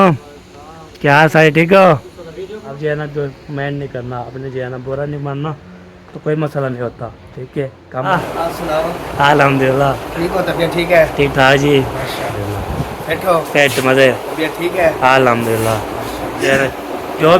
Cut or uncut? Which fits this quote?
cut